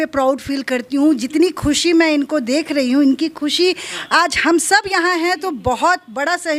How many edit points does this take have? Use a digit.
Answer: 0